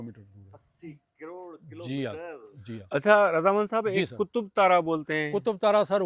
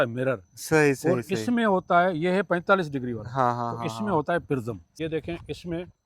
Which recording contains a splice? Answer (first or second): second